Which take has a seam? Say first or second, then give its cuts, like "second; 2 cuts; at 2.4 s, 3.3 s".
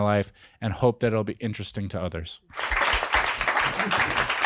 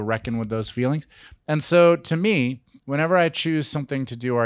first; 1 cut; at 2.7 s